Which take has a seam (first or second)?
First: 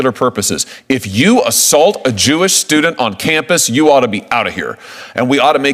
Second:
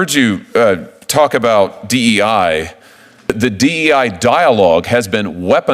second